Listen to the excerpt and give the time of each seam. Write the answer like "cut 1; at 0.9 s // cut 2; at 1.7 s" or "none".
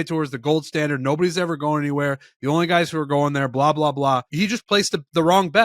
cut 1; at 4.3 s